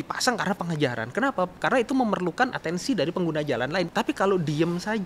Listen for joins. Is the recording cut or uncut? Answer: cut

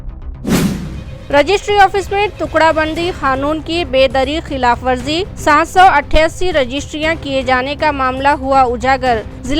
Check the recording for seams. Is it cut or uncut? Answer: cut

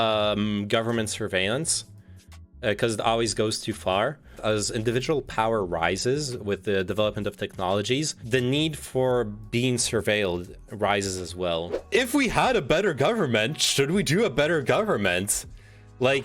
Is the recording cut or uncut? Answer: cut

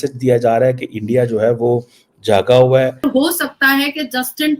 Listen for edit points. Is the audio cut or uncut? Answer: cut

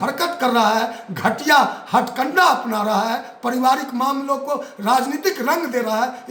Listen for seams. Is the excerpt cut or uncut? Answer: uncut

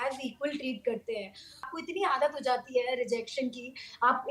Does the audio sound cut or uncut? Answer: cut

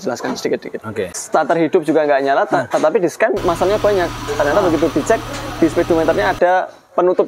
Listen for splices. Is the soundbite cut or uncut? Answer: cut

